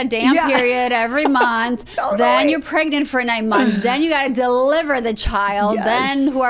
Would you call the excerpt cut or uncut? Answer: uncut